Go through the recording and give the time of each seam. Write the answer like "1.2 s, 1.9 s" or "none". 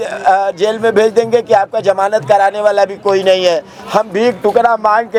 none